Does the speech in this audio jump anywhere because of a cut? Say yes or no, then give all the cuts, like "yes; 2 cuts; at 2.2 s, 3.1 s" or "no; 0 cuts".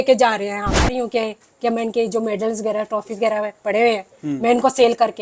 yes; 1 cut; at 1.0 s